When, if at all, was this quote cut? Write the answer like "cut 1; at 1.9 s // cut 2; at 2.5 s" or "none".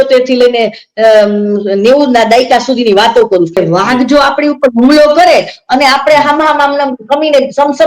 cut 1; at 3.6 s